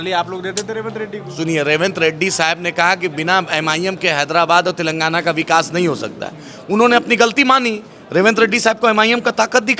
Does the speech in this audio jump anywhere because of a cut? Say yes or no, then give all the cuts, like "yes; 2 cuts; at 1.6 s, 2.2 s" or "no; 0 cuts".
no; 0 cuts